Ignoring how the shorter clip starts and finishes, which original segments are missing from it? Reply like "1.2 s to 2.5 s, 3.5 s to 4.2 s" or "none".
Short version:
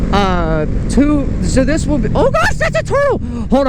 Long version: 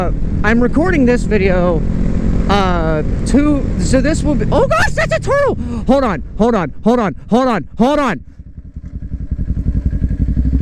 none

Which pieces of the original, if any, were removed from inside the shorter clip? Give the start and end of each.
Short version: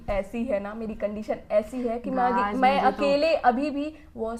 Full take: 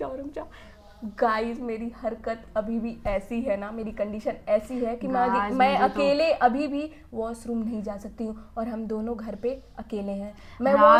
none

